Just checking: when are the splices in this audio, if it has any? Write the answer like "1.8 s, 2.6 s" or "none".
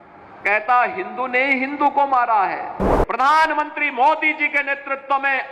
2.9 s